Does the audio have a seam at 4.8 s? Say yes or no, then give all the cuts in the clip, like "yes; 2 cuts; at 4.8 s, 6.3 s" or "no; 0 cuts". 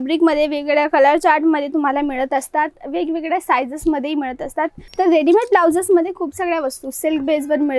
yes; 1 cut; at 4.8 s